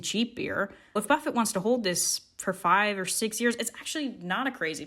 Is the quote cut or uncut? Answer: cut